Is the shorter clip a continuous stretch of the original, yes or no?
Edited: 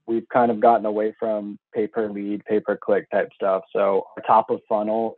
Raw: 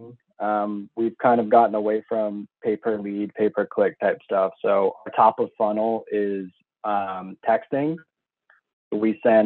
yes